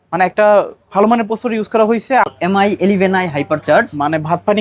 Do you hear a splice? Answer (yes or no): yes